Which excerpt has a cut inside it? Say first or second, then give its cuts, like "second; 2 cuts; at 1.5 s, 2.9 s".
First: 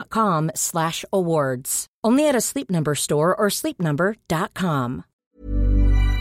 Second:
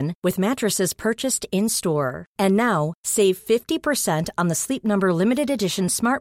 first; 1 cut; at 5.1 s